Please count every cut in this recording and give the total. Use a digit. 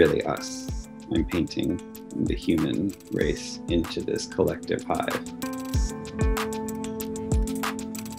1